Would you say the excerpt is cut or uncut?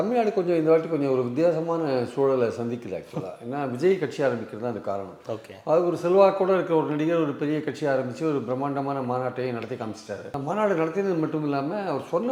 uncut